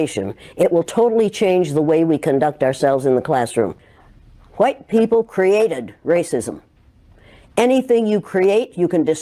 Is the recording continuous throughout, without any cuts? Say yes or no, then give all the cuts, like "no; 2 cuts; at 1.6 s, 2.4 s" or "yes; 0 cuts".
no; 1 cut; at 3.8 s